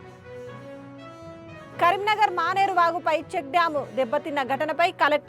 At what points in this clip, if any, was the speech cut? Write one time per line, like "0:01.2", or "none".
none